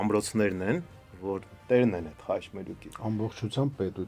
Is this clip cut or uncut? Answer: uncut